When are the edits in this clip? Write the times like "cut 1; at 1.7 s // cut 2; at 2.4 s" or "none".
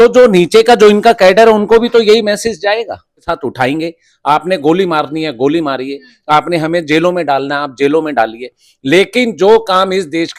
cut 1; at 3.2 s